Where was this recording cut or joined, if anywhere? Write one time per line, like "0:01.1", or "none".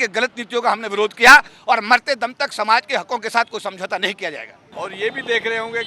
0:01.5
0:04.6